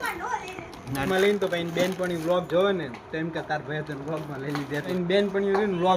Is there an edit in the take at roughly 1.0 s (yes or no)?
yes